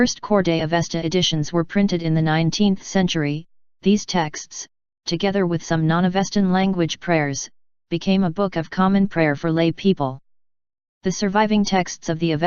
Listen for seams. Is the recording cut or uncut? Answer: uncut